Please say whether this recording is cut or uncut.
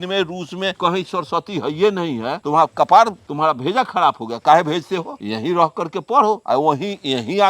cut